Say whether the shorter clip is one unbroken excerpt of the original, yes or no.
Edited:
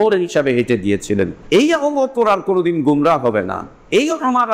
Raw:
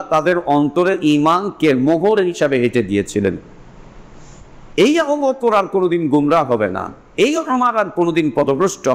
no